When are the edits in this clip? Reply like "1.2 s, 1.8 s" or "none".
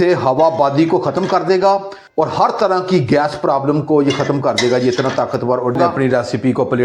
5.8 s